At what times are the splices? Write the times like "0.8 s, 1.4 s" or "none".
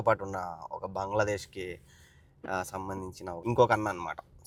none